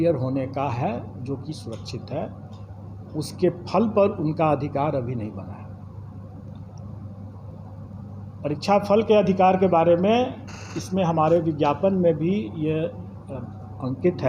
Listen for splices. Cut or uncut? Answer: uncut